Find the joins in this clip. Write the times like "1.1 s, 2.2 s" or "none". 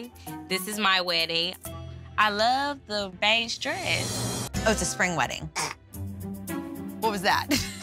4.5 s